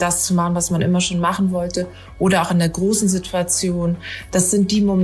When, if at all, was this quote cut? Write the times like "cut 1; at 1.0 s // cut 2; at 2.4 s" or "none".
cut 1; at 4.1 s